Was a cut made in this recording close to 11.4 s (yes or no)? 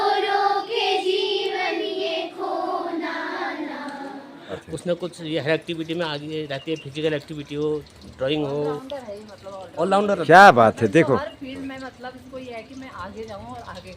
no